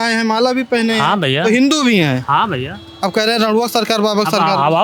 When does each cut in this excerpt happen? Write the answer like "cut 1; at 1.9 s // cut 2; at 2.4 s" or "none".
none